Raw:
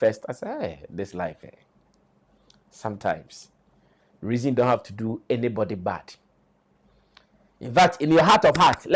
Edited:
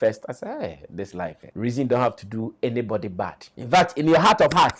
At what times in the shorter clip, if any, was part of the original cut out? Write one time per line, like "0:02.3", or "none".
0:01.4
0:03.5